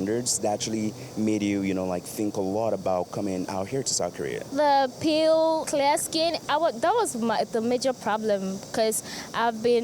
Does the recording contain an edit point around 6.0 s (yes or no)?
yes